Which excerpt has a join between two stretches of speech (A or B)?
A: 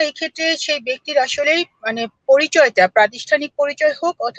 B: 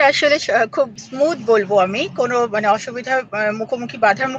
B